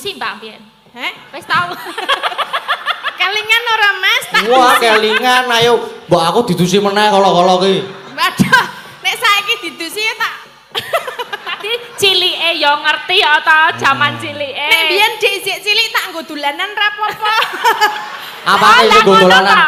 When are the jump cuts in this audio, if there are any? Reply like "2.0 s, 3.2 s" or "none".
none